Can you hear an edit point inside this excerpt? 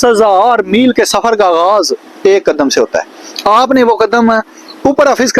no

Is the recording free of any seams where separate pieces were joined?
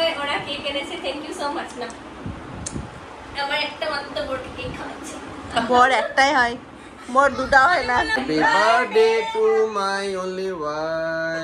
no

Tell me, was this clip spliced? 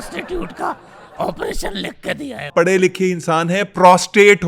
yes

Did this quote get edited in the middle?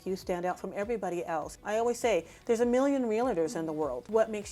yes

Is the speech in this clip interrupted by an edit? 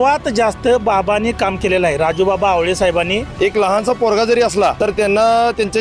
yes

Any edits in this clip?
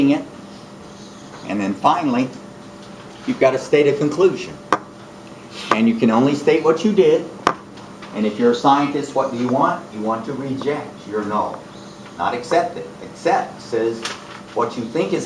yes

